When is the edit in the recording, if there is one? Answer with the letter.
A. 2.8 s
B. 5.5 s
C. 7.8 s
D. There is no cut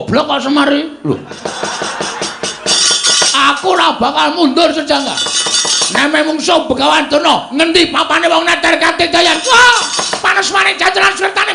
A